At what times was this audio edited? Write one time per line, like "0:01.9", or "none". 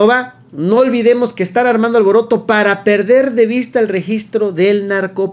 none

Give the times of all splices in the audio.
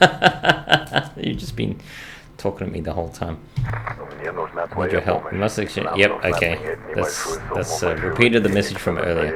none

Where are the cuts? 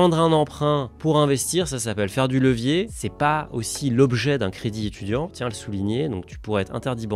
none

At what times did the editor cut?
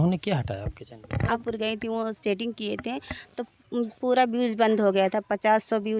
0:01.4

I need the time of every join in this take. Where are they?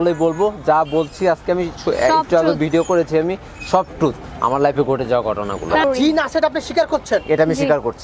0:05.8

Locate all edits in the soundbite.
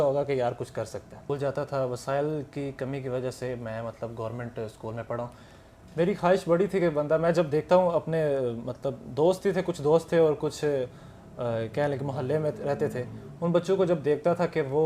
0:01.1

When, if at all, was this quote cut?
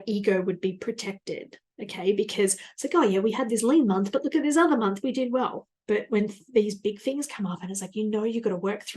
0:05.7

